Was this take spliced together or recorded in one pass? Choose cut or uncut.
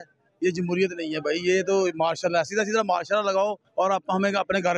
uncut